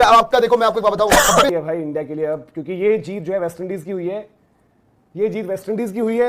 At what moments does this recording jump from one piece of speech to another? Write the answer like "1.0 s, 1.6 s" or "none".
1.6 s